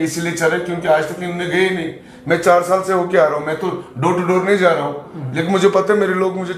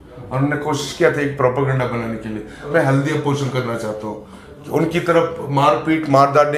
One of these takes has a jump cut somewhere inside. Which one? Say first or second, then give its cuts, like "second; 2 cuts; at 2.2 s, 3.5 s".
second; 1 cut; at 2.7 s